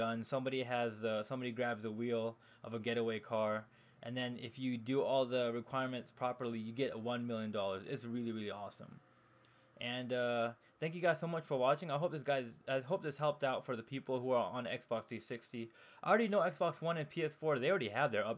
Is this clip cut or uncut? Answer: uncut